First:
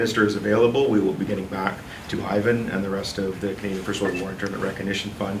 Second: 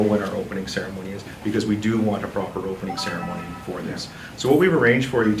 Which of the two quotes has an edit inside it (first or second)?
second